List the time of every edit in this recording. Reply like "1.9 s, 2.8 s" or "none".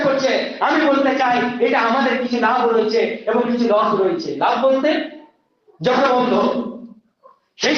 6.0 s

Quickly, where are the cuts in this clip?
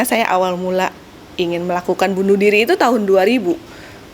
none

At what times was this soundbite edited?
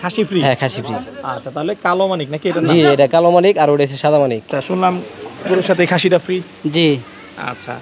4.5 s

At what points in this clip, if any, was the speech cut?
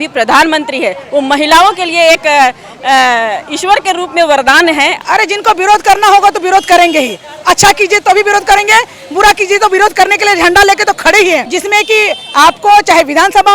5.0 s, 11.5 s

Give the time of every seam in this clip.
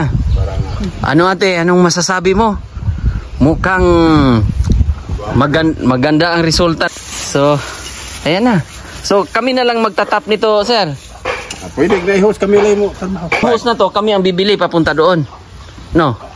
6.9 s, 13.4 s

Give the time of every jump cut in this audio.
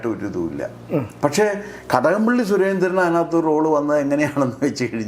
1.1 s

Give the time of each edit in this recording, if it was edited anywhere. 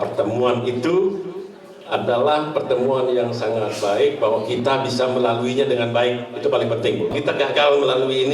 7.1 s

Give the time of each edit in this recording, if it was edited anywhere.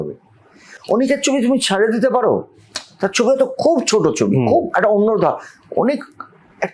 none

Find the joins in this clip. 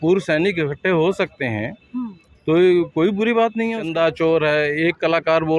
3.8 s

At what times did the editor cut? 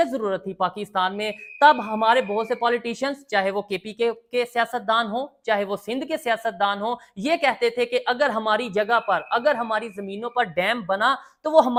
none

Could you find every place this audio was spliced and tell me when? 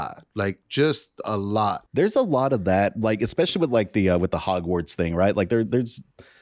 1.8 s

